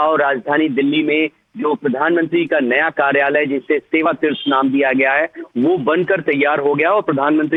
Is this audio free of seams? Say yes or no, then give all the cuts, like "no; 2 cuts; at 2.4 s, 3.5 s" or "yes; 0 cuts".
yes; 0 cuts